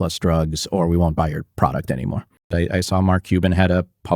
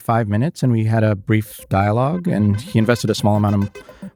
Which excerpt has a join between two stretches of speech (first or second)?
first